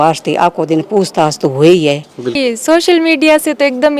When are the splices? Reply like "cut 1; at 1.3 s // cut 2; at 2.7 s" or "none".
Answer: cut 1; at 2.4 s